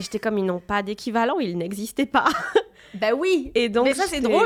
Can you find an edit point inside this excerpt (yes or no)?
no